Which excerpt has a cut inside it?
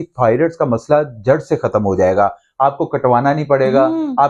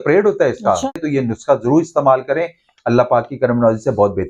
second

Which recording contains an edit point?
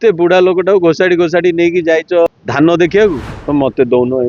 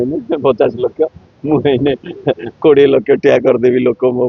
first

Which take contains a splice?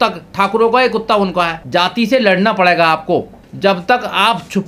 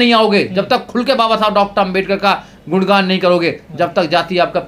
first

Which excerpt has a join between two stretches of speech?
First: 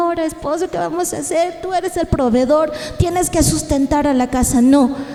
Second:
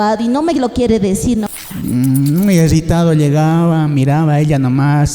second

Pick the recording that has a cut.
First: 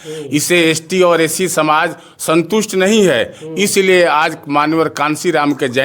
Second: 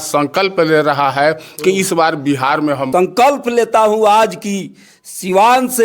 second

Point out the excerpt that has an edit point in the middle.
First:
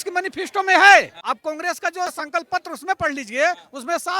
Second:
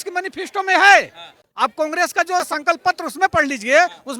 first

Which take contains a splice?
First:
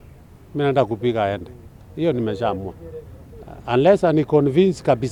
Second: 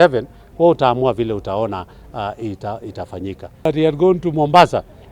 second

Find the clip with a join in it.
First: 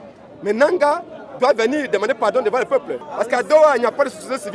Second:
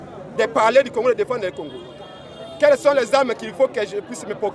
first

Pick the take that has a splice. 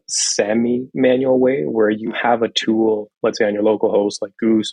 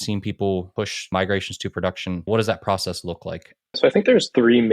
second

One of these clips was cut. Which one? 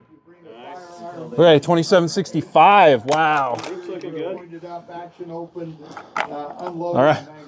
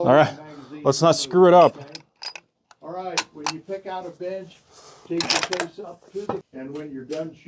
second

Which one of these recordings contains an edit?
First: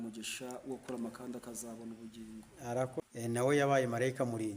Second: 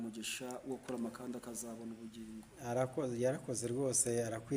first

